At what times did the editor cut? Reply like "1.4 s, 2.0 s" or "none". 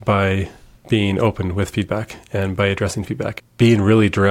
3.3 s